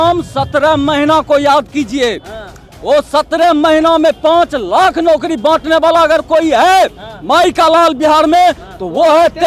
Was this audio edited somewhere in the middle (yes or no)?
no